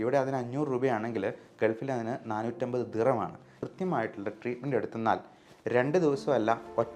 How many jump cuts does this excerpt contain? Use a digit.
1